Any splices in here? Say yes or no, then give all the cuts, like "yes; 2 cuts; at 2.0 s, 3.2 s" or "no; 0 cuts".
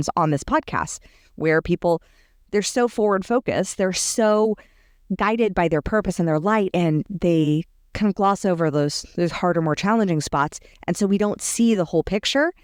no; 0 cuts